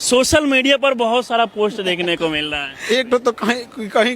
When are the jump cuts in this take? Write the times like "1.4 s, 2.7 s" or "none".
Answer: 2.8 s